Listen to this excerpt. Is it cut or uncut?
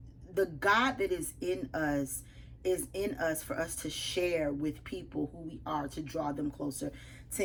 uncut